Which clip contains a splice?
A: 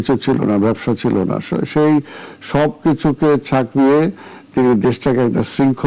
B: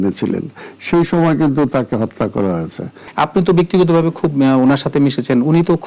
B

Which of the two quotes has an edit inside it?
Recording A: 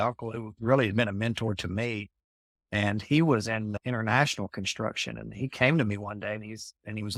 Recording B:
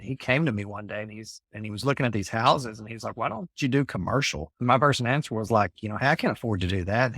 B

